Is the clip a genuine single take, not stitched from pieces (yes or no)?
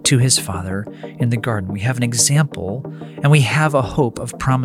yes